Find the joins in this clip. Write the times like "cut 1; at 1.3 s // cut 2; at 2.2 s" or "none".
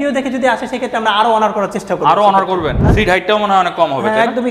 cut 1; at 2.8 s